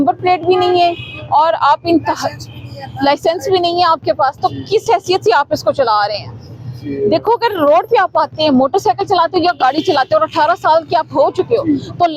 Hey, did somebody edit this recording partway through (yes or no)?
no